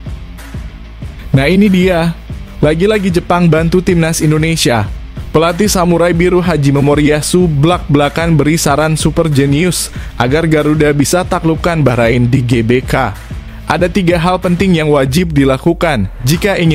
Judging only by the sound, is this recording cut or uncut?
cut